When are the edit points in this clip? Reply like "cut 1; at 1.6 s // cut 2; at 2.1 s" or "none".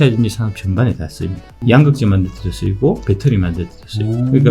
cut 1; at 1.6 s